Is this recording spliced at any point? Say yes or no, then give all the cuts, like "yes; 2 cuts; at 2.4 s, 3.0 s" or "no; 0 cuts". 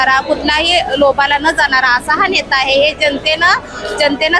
no; 0 cuts